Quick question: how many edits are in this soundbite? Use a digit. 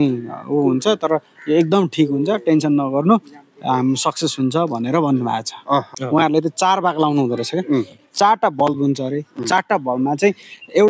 1